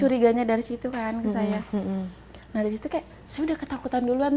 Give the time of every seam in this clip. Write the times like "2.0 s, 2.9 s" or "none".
none